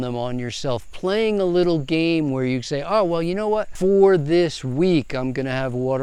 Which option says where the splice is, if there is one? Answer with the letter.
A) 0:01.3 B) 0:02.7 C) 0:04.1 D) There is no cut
D